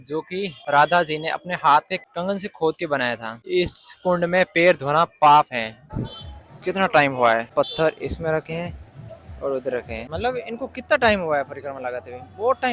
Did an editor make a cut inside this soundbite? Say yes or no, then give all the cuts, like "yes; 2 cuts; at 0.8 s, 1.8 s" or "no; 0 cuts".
yes; 1 cut; at 5.8 s